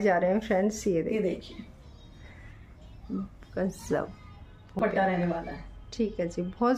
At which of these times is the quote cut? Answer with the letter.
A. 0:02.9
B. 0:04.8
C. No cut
B